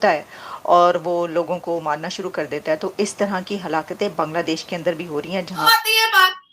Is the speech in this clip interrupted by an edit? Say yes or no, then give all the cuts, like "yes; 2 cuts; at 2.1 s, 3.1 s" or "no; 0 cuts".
yes; 1 cut; at 5.6 s